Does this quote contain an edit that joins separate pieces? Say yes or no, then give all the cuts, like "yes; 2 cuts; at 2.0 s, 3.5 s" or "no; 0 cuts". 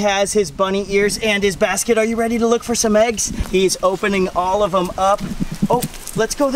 yes; 1 cut; at 3.3 s